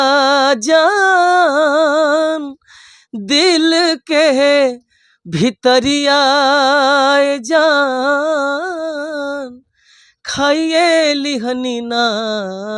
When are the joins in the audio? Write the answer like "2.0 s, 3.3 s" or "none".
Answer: none